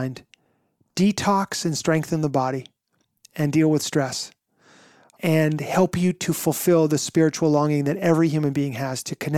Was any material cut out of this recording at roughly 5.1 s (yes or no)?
yes